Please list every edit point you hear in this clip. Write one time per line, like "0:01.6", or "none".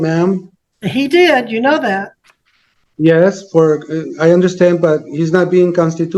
none